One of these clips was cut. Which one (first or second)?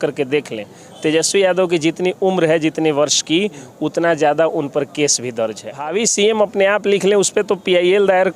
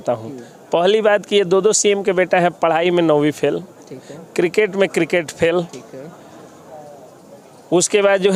first